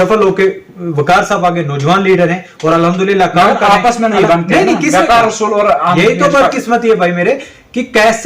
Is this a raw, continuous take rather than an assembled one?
yes; 0 cuts

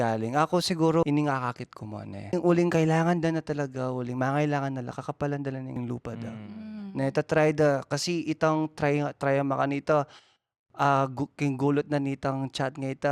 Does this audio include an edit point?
yes; 3 cuts; at 1.0 s, 2.3 s, 5.8 s

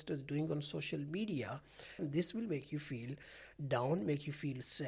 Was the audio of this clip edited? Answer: yes; 1 cut; at 2.0 s

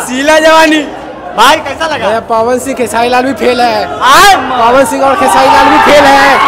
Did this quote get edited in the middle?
no; 0 cuts

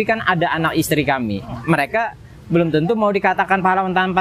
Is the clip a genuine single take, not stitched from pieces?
no; 1 cut; at 1.5 s

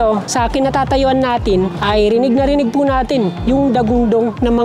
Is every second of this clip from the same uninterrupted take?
no; 1 cut; at 1.8 s

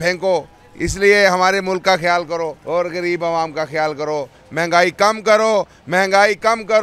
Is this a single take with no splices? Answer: no; 1 cut; at 2.6 s

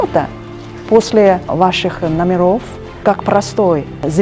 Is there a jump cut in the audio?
yes; 1 cut; at 2.8 s

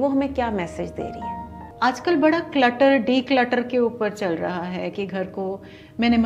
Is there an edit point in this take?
yes; 1 cut; at 1.6 s

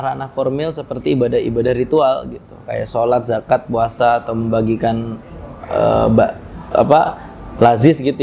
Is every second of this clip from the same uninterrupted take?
yes; 0 cuts

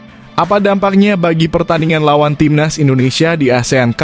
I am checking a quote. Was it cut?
no; 0 cuts

